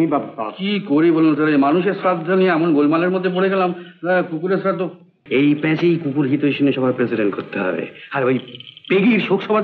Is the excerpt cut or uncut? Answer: cut